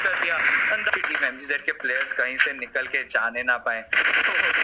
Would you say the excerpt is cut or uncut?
cut